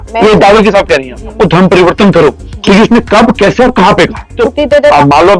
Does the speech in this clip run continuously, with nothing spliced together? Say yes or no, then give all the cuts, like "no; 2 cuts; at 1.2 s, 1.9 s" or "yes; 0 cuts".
no; 2 cuts; at 1.3 s, 4.4 s